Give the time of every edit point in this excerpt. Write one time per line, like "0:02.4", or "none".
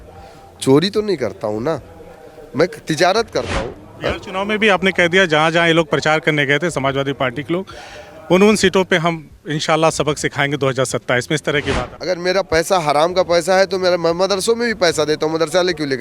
0:03.7
0:11.9